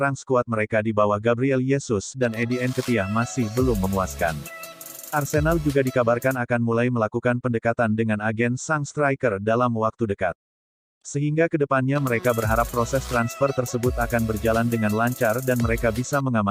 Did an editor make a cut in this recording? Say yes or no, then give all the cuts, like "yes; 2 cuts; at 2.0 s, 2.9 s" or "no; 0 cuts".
no; 0 cuts